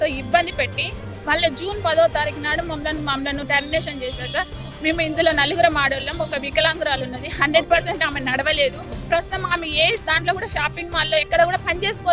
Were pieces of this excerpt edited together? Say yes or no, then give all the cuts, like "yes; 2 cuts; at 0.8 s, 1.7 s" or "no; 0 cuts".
no; 0 cuts